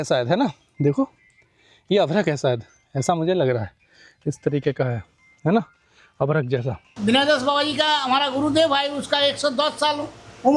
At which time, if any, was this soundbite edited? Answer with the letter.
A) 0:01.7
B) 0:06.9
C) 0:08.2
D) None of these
B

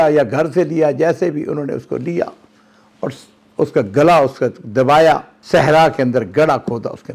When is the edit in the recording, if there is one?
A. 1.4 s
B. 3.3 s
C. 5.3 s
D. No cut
C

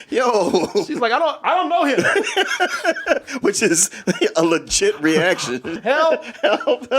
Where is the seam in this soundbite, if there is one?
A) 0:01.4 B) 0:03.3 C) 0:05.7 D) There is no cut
C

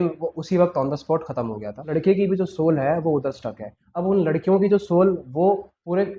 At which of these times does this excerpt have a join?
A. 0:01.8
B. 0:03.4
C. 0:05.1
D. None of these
A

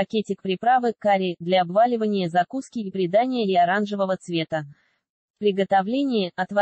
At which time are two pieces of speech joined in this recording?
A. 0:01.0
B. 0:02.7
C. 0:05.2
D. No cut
C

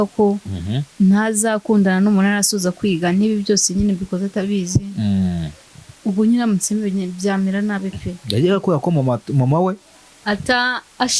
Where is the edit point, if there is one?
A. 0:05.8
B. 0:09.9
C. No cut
C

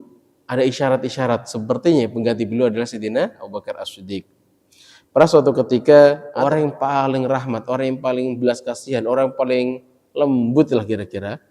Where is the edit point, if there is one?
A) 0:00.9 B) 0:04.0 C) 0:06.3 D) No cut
C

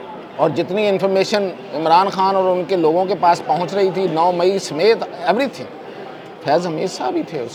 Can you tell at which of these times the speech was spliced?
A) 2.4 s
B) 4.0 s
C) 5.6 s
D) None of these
D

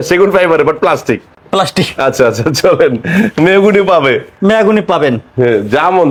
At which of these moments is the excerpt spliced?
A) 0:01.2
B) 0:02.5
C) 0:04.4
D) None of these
D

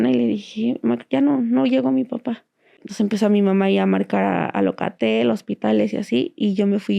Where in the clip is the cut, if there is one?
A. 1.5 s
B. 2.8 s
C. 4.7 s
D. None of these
B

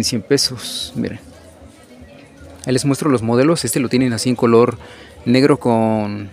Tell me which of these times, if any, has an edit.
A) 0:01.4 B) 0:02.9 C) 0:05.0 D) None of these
D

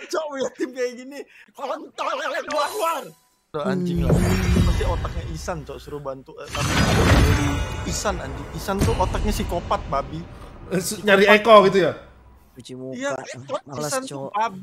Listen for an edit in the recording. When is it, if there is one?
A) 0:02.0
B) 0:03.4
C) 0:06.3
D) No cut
B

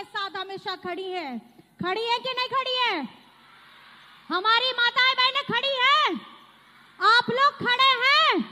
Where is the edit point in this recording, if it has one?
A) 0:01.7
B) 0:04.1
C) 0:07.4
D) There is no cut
D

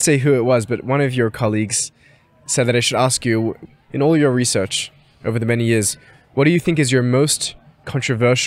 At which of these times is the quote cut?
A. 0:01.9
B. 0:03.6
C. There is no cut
B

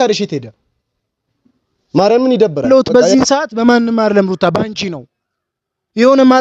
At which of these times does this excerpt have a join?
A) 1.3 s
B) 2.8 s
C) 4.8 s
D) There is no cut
B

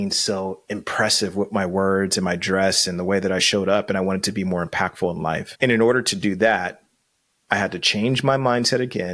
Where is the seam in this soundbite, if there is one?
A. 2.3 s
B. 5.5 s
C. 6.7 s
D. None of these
B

